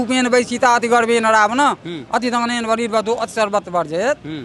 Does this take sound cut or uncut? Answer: uncut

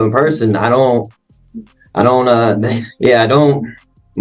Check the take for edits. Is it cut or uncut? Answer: uncut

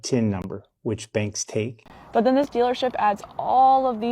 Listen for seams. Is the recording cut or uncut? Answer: cut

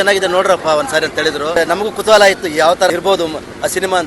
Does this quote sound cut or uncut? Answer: cut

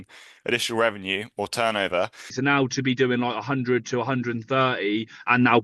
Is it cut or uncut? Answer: cut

